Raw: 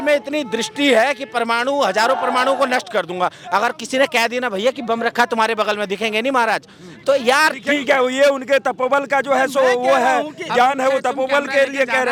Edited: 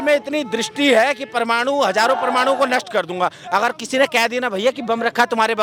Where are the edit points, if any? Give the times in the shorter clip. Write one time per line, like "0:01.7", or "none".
none